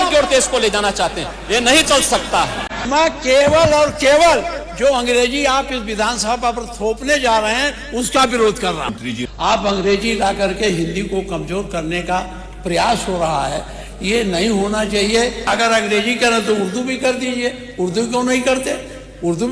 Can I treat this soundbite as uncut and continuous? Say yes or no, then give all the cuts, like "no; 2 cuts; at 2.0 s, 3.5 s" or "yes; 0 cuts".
no; 3 cuts; at 2.8 s, 9.0 s, 15.5 s